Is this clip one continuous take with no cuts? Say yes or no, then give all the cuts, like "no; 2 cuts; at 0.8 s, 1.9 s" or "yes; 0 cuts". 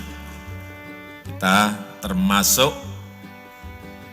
no; 1 cut; at 2.7 s